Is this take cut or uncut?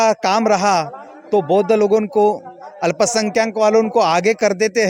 uncut